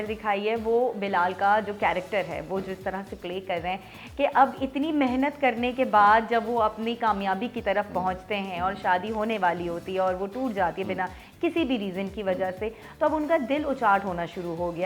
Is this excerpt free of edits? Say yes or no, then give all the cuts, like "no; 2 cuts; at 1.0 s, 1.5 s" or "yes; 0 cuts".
yes; 0 cuts